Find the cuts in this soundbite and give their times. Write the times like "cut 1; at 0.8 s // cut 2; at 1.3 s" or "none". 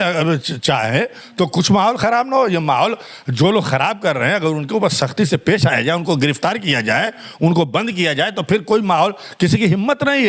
none